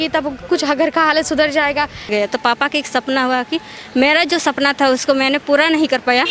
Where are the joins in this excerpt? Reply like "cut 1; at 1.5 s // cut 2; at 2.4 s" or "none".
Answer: cut 1; at 2.0 s